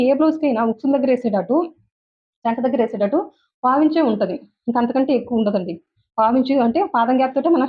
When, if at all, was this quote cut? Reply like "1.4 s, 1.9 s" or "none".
none